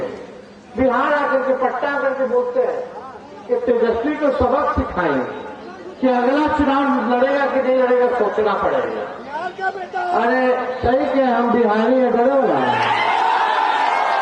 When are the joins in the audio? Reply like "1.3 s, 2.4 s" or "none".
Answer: none